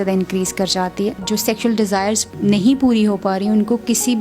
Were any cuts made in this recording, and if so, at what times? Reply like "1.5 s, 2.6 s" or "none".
1.2 s, 2.3 s

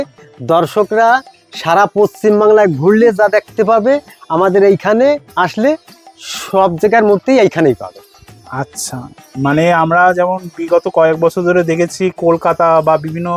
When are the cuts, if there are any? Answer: none

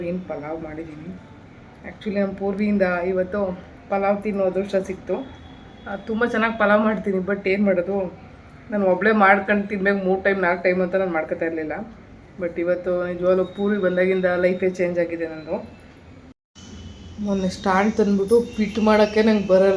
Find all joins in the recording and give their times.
16.5 s

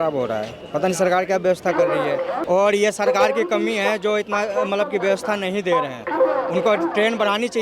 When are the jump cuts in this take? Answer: 2.4 s, 6.0 s

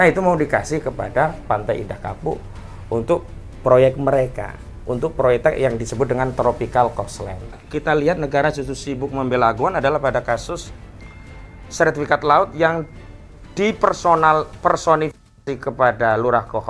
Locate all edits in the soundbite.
7.7 s

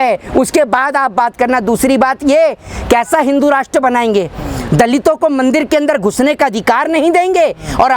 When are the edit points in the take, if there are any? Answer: none

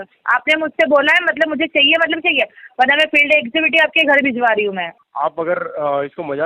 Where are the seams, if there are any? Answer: 4.9 s

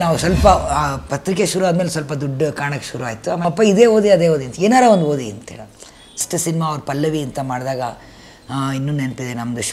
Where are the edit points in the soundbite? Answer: 3.4 s, 6.2 s

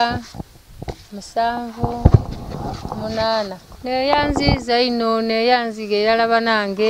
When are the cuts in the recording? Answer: 3.7 s

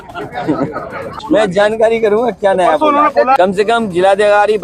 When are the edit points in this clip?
1.2 s, 3.4 s

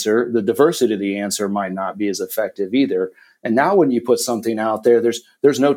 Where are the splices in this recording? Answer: none

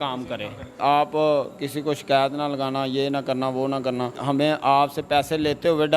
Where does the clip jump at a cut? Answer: 0.8 s, 4.2 s

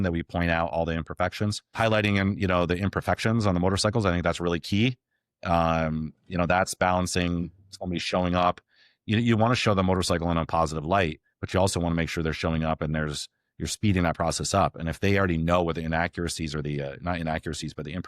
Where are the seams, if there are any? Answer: 1.7 s

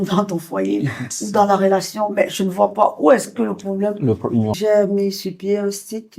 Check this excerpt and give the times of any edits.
4.5 s

